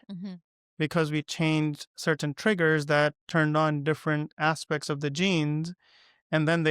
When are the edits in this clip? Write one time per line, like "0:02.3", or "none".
none

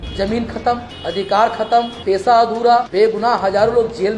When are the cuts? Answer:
0:00.9
0:01.9
0:02.9

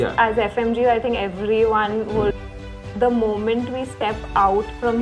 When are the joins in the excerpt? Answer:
0:02.4

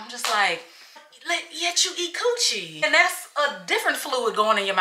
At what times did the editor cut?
0:01.1
0:02.7

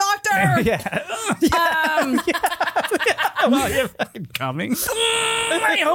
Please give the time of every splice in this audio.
0:04.9

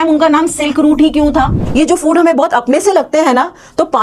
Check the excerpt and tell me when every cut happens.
0:01.6

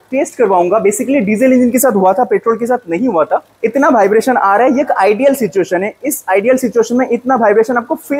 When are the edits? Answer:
0:03.5

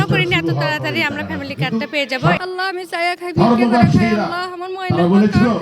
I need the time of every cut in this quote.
0:02.4

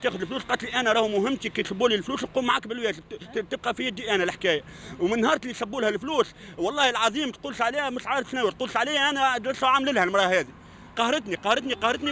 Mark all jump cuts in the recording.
none

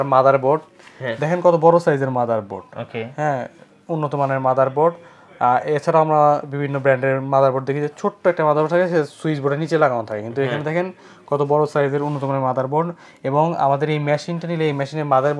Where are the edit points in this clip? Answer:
none

